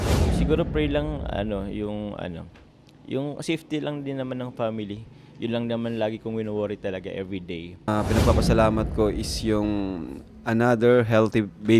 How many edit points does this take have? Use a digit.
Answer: 1